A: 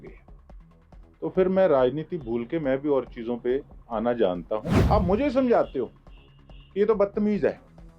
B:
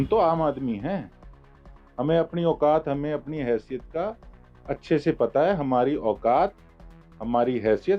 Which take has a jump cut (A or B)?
A